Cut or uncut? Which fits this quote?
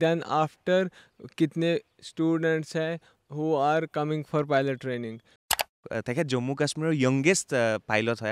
cut